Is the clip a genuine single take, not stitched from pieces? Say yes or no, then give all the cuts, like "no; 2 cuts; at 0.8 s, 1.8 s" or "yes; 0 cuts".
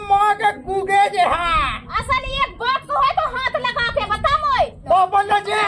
no; 1 cut; at 4.8 s